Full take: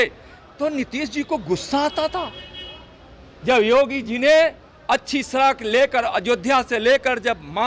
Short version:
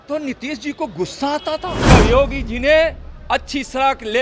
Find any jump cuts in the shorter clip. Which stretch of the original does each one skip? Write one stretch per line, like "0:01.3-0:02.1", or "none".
0:02.4-0:03.5

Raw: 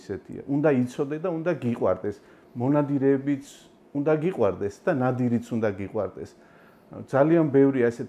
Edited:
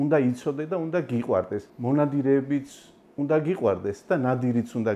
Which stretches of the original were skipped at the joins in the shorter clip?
0:02.2-0:02.4

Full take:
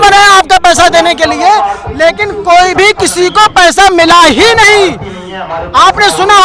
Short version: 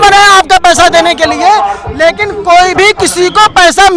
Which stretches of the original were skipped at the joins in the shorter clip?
none

